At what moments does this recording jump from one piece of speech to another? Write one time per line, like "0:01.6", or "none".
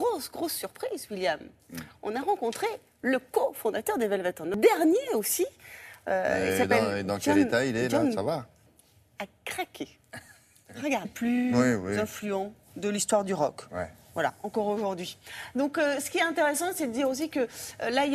none